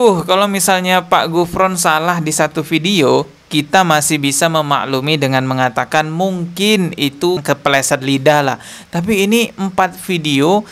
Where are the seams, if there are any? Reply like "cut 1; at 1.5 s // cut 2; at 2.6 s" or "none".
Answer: none